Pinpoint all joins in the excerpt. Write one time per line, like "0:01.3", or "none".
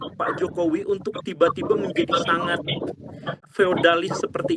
0:03.5